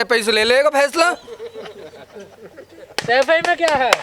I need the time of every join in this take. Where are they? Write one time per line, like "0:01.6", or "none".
none